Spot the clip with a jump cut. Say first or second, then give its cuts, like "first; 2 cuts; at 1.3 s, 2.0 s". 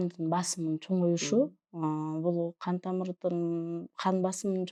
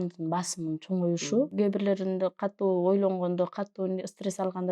second; 1 cut; at 1.5 s